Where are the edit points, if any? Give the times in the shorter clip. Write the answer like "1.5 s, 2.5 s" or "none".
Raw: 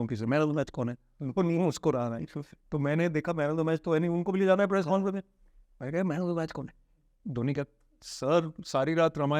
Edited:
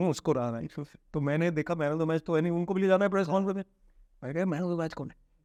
none